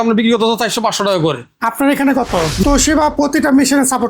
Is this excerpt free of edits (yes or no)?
no